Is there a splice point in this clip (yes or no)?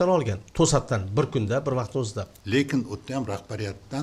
yes